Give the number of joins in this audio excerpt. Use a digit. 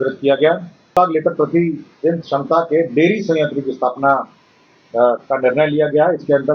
1